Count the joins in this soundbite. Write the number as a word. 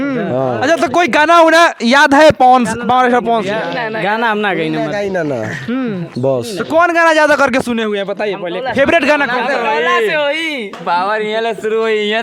zero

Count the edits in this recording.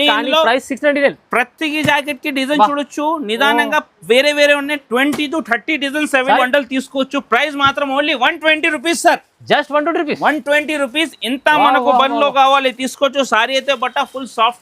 one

